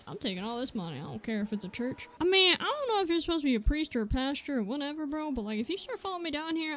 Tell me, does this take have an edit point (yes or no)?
yes